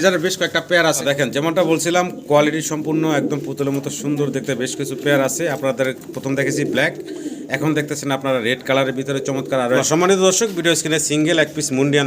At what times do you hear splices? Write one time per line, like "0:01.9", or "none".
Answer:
0:01.0
0:09.8